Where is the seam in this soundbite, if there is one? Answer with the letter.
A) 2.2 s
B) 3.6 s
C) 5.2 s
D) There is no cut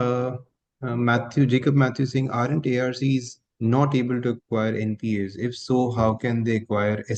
D